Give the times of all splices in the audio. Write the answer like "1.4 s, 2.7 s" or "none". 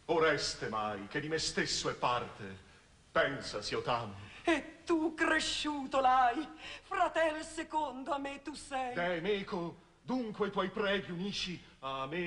5.0 s